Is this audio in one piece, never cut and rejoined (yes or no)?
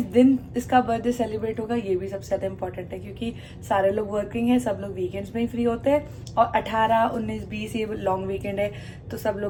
yes